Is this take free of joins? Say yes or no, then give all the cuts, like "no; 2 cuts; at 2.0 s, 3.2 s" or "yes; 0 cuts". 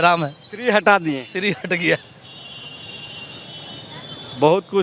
yes; 0 cuts